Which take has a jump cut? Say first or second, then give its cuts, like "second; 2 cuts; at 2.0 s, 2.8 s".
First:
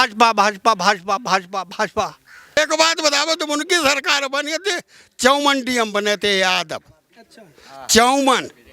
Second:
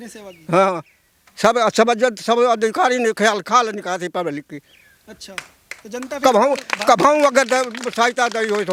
first; 1 cut; at 2.6 s